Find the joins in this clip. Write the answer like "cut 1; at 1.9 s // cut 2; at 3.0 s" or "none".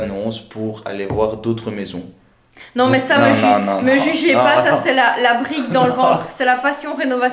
none